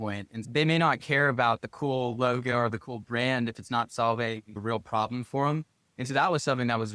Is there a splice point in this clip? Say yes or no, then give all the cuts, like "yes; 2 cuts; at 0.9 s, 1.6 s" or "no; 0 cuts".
no; 0 cuts